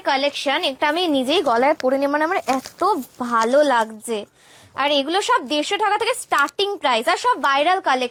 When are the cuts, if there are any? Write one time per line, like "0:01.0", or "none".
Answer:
none